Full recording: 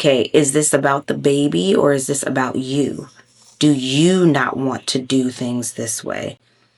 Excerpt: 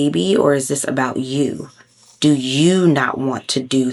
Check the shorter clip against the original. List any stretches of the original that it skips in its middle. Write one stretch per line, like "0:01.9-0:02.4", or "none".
none